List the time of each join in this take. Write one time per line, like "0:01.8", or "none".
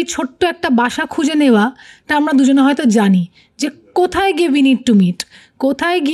none